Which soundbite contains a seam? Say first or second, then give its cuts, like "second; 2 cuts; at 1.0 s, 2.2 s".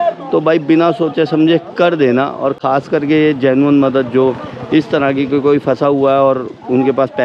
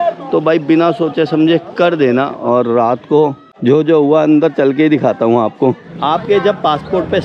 second; 2 cuts; at 2.4 s, 5.9 s